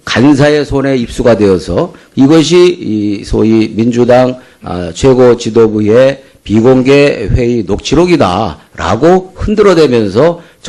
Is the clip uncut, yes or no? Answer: no